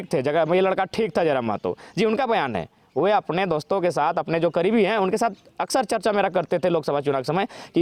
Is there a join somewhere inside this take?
no; 0 cuts

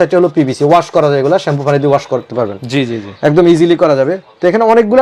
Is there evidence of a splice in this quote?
no; 0 cuts

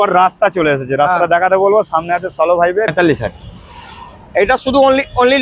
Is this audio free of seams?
no; 1 cut; at 2.9 s

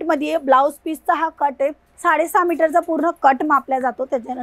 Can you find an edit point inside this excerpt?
yes; 1 cut; at 1.9 s

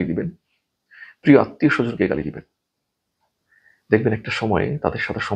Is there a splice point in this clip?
no; 0 cuts

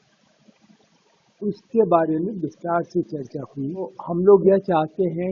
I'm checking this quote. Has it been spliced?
yes; 1 cut; at 3.9 s

